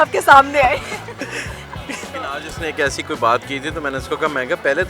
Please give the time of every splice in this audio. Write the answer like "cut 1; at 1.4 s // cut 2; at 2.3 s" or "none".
cut 1; at 2.1 s